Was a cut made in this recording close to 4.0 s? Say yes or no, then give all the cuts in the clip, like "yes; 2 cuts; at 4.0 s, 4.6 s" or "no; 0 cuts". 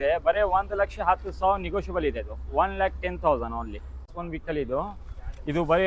yes; 1 cut; at 4.0 s